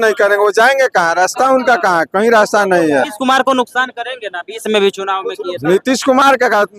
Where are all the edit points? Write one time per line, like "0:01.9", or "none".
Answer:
0:03.1